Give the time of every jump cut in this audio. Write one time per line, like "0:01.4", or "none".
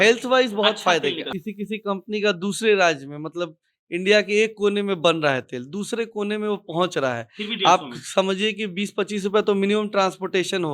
0:01.3